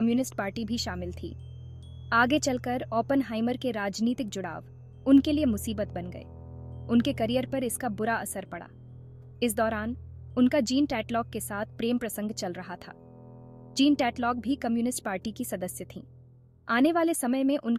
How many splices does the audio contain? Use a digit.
0